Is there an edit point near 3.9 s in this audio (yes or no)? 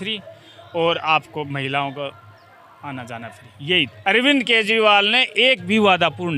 yes